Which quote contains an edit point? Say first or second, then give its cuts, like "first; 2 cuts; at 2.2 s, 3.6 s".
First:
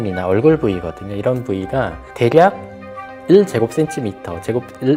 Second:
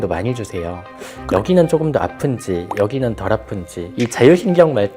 second; 1 cut; at 3.9 s